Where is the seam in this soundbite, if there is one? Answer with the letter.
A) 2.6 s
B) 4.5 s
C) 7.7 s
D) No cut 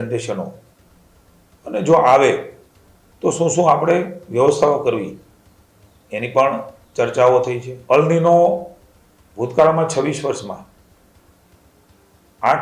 C